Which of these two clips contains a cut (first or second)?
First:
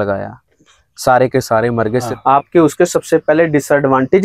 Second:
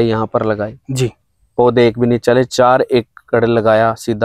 first